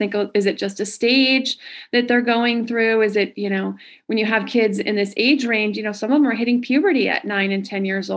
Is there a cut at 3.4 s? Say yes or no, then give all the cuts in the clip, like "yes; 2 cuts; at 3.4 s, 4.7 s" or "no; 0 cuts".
no; 0 cuts